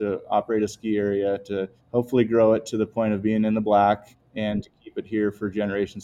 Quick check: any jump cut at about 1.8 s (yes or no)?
yes